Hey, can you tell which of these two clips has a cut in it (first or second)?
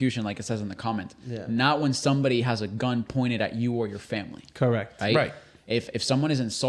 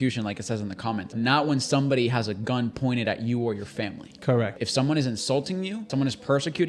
second